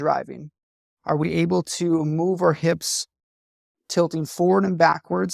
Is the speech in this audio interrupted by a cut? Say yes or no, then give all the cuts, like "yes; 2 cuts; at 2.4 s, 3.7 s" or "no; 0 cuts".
no; 0 cuts